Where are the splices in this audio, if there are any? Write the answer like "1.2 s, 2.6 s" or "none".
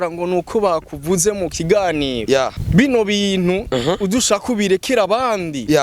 2.6 s